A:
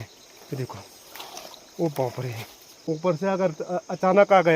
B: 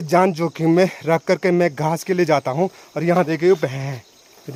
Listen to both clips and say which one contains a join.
A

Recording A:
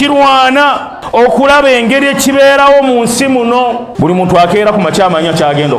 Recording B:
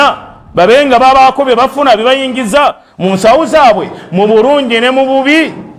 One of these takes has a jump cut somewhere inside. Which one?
A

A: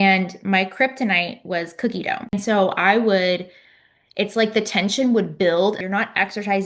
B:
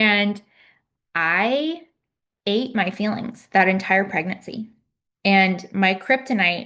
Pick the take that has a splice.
A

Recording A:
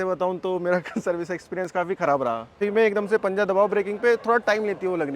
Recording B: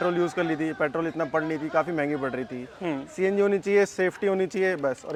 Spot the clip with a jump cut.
A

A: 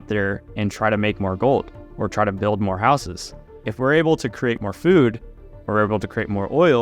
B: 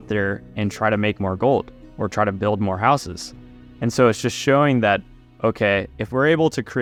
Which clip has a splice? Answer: A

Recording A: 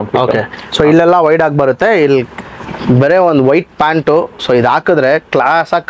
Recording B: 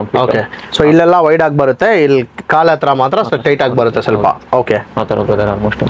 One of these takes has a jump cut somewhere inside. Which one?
A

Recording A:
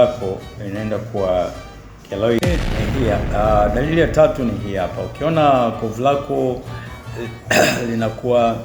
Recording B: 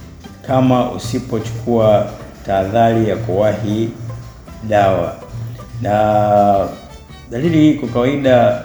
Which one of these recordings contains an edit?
A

